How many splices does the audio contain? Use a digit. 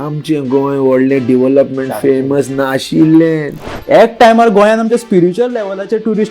1